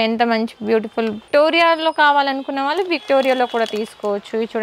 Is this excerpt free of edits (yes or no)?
no